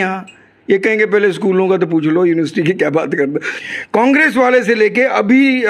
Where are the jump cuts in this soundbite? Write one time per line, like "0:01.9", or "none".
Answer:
0:03.5